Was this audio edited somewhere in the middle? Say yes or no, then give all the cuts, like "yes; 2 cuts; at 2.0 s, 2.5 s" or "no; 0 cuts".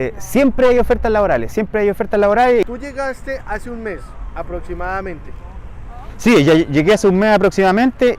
yes; 1 cut; at 2.6 s